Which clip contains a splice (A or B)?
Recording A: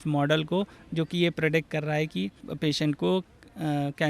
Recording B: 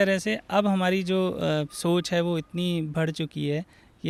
A